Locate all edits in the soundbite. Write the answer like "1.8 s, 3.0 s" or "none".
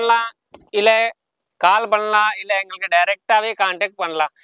none

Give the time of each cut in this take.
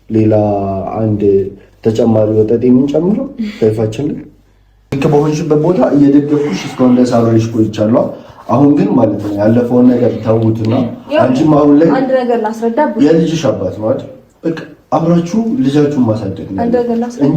5.0 s

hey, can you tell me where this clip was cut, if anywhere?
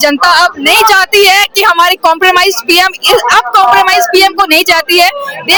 none

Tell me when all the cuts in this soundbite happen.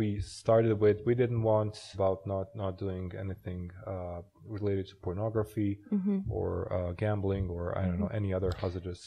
1.9 s

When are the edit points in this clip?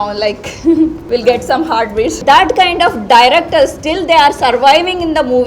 1.0 s, 2.2 s

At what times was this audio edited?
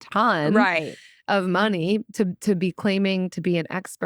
none

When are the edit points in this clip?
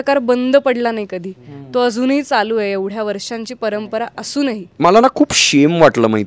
4.7 s

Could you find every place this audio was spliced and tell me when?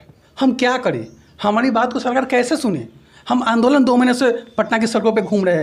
none

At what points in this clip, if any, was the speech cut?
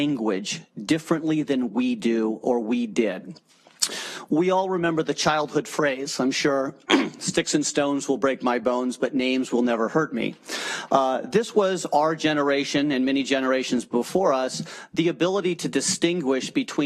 none

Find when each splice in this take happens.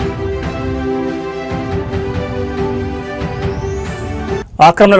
none

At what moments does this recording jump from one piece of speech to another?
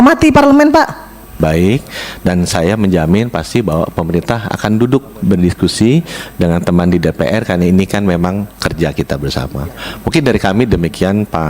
1.3 s

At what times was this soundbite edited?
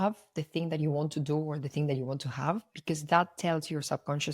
2.7 s

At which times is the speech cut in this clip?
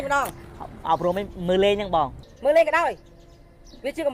2.2 s

